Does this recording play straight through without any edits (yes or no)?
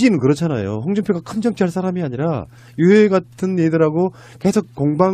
no